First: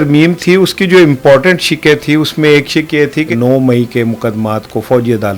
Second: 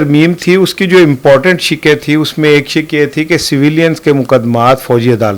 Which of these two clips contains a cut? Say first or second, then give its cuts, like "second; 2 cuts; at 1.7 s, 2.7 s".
first; 1 cut; at 3.3 s